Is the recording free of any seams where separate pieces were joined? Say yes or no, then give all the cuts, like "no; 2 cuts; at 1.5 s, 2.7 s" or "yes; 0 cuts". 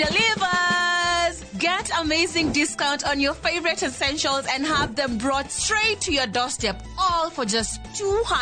yes; 0 cuts